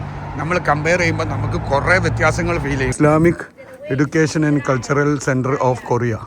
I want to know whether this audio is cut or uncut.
cut